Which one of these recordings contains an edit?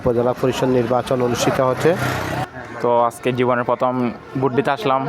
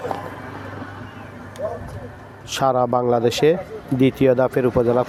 first; 1 cut; at 2.4 s

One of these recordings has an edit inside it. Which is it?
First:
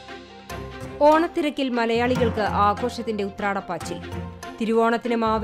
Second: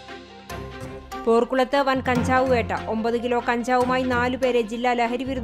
second; 1 cut; at 1.0 s

